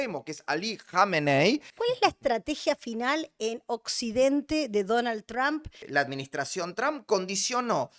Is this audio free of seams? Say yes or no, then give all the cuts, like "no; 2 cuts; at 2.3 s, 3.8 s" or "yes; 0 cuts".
no; 2 cuts; at 1.7 s, 5.8 s